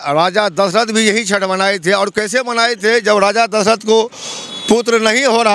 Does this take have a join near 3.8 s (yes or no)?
no